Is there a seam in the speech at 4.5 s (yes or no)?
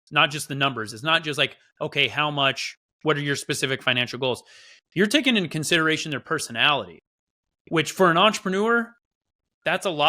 no